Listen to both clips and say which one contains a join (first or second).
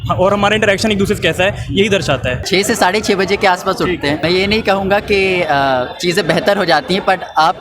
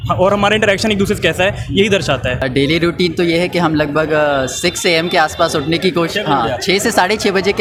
first